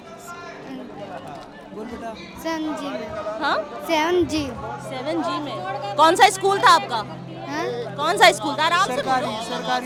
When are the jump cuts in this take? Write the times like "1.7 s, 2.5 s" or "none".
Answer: none